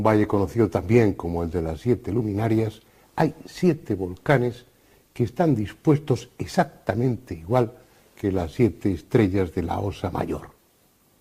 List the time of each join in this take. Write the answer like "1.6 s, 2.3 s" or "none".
9.6 s